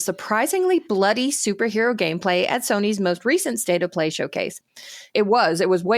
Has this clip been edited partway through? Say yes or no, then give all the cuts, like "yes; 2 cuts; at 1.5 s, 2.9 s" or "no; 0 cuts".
yes; 1 cut; at 5.0 s